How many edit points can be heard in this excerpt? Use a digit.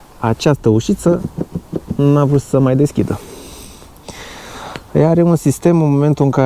0